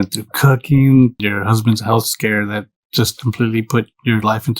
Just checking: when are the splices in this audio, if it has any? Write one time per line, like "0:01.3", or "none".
0:01.2